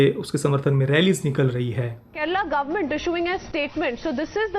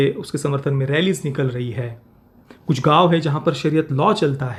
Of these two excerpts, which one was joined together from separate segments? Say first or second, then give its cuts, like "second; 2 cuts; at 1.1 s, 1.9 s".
first; 1 cut; at 2.1 s